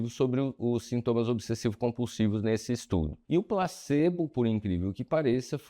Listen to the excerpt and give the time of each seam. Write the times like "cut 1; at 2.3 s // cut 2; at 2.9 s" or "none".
cut 1; at 3.2 s

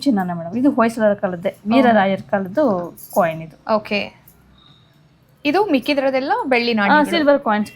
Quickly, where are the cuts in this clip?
none

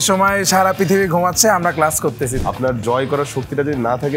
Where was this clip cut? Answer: cut 1; at 2.4 s

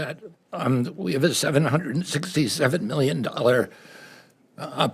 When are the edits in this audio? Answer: cut 1; at 1.4 s

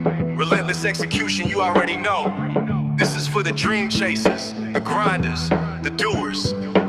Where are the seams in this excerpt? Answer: none

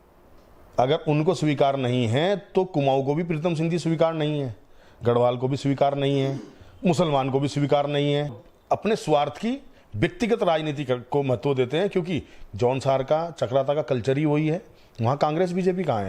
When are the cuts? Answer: cut 1; at 8.4 s

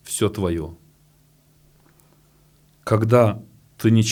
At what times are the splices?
none

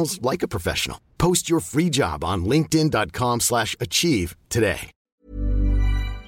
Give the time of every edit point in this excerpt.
cut 1; at 5.1 s

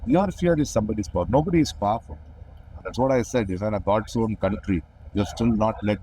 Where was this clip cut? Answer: cut 1; at 2.8 s // cut 2; at 5.0 s

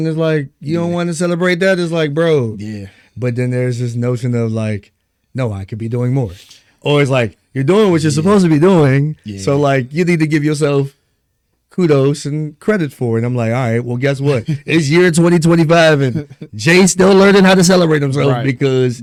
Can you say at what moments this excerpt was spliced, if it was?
none

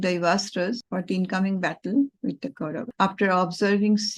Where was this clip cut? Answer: cut 1; at 0.9 s // cut 2; at 2.8 s

